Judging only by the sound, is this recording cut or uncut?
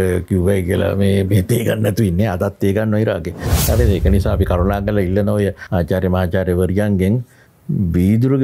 cut